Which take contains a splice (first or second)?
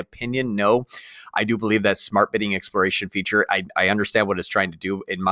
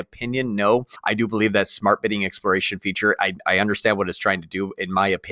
second